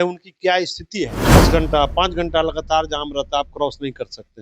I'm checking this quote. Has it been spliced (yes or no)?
yes